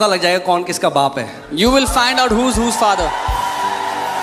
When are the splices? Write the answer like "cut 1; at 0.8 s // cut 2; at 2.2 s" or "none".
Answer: none